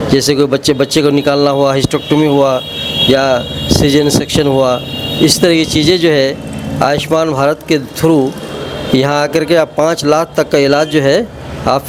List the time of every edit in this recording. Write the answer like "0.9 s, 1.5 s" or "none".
none

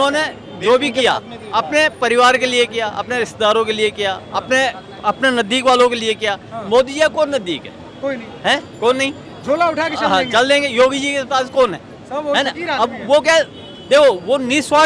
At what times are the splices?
none

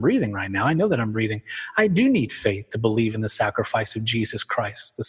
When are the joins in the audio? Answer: none

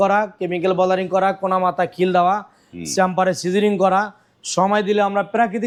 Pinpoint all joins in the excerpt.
none

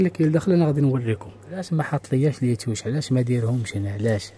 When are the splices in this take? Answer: 1.7 s

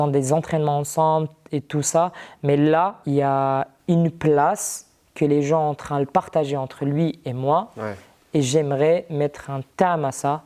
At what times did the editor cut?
3.0 s

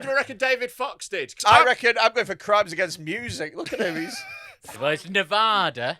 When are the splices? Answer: 1.3 s, 4.8 s

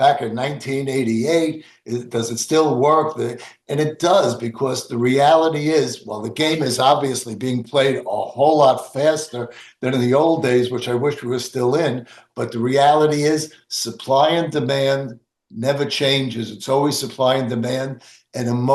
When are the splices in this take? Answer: none

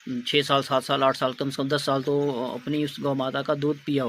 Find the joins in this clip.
none

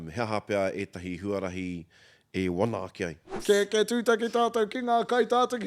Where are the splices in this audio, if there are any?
3.4 s

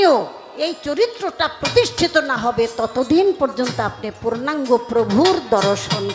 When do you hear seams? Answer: none

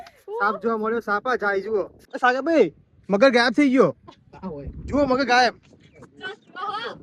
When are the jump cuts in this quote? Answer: 2.0 s

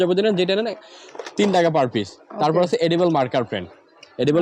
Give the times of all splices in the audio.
none

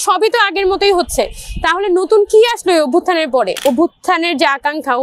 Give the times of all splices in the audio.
3.6 s

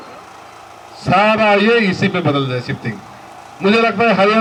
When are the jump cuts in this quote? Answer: none

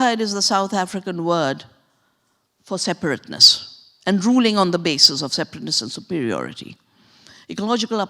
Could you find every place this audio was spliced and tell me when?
none

